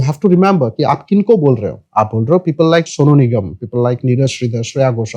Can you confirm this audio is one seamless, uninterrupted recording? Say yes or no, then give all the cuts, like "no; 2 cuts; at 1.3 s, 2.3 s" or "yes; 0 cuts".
no; 2 cuts; at 1.8 s, 2.9 s